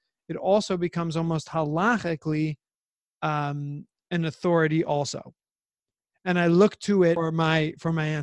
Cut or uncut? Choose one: cut